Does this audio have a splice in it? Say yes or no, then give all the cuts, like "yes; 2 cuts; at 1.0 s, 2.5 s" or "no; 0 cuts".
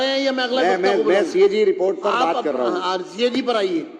no; 0 cuts